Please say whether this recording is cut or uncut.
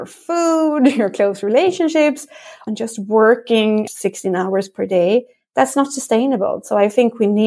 uncut